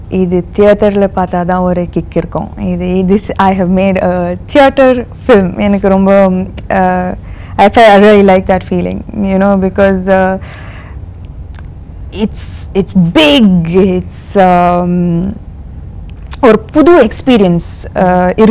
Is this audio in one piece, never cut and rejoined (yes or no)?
yes